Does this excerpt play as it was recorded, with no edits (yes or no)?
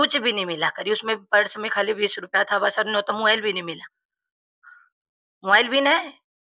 yes